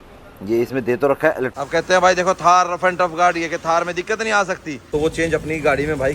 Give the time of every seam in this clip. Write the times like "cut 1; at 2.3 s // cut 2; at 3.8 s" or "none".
cut 1; at 1.5 s // cut 2; at 4.8 s